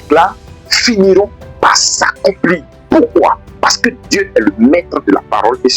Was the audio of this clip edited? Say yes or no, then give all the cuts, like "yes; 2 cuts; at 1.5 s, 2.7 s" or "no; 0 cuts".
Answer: yes; 1 cut; at 2.7 s